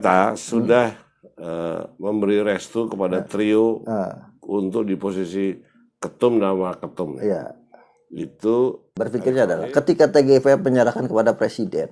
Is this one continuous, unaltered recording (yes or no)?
no